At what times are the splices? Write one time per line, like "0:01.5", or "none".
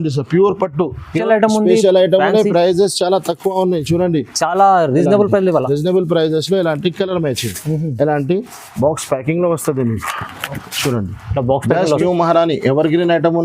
0:01.1
0:12.0